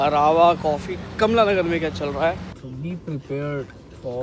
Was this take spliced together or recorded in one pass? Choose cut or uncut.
cut